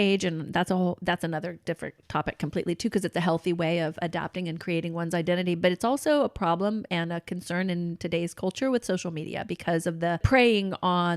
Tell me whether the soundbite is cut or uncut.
cut